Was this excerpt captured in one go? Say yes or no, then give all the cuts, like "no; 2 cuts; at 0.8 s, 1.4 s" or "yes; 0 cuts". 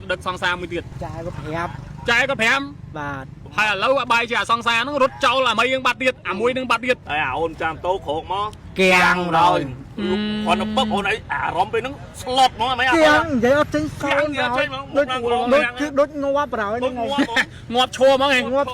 no; 3 cuts; at 0.9 s, 3.3 s, 7.0 s